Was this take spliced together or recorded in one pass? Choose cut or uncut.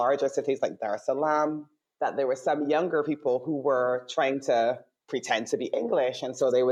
uncut